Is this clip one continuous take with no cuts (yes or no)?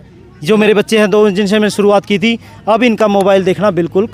yes